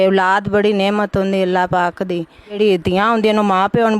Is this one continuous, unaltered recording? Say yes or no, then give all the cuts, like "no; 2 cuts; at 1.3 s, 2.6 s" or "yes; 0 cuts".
no; 1 cut; at 2.6 s